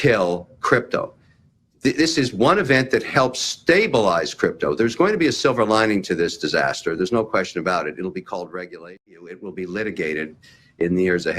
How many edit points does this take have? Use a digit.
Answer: 1